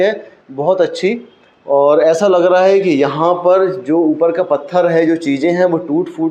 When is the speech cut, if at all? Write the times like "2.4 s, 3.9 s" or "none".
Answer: none